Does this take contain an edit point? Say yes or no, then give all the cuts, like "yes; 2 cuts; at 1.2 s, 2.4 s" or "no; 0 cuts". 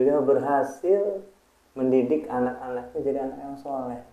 no; 0 cuts